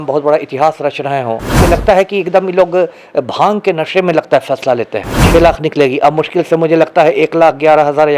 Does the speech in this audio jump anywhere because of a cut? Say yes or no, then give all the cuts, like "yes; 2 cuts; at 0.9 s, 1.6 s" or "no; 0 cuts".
yes; 2 cuts; at 1.6 s, 5.2 s